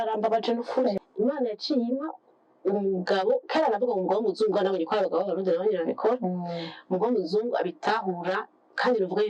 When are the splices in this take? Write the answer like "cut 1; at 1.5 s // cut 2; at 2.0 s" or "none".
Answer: cut 1; at 1.0 s

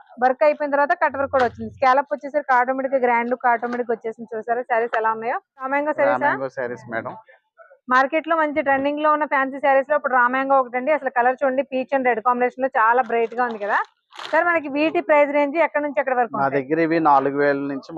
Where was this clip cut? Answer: cut 1; at 5.7 s

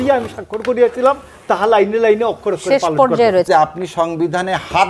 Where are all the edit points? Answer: cut 1; at 3.5 s

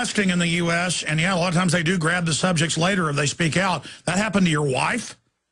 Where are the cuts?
cut 1; at 1.2 s

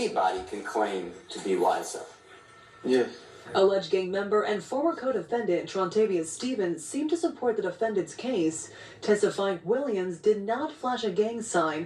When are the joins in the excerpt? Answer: cut 1; at 10.7 s

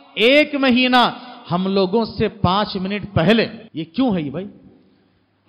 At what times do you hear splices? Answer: cut 1; at 3.6 s

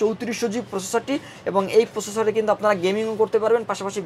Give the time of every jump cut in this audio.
none

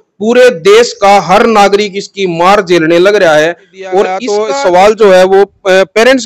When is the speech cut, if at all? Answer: cut 1; at 4.3 s

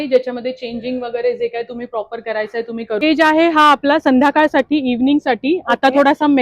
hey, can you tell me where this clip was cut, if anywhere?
cut 1; at 3.0 s

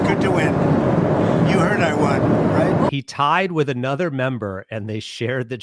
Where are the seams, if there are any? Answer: cut 1; at 2.9 s

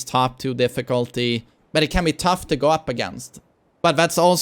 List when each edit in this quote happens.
cut 1; at 1.6 s

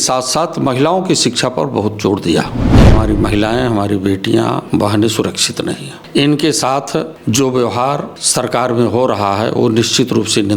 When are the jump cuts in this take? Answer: cut 1; at 2.9 s // cut 2; at 4.6 s // cut 3; at 5.9 s // cut 4; at 7.1 s // cut 5; at 8.2 s

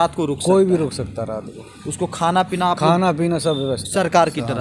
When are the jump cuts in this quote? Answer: none

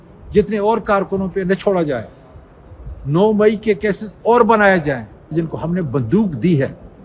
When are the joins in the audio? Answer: cut 1; at 5.3 s

